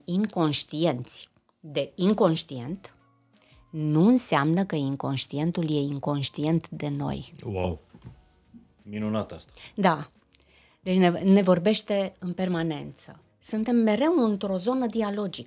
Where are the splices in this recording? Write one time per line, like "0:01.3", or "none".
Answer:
none